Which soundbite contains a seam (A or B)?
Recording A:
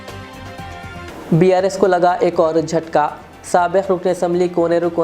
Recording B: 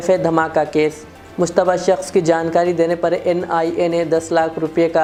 A